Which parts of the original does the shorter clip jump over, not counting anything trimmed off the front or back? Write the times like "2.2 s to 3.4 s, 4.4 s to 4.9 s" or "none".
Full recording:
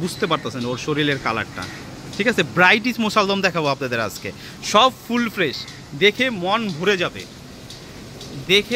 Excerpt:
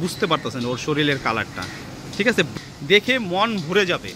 2.5 s to 5.6 s